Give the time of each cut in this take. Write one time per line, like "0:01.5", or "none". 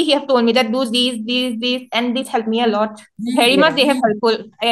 0:03.2

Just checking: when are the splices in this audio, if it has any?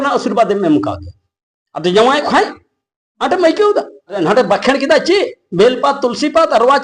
0:04.2

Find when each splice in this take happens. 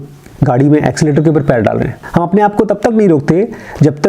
0:02.0

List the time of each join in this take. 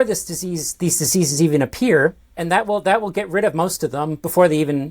0:02.3

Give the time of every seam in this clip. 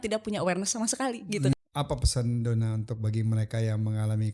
0:01.5

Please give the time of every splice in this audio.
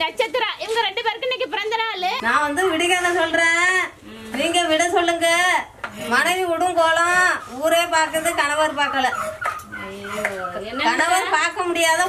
0:02.2

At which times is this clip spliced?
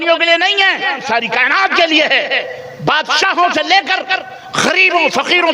0:01.0

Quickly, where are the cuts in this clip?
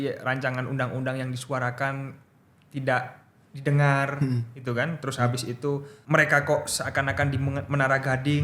0:05.9

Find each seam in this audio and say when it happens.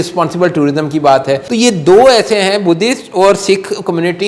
0:01.4

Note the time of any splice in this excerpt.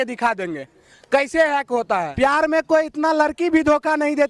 0:02.1

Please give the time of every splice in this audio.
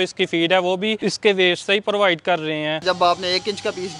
0:01.0
0:02.8

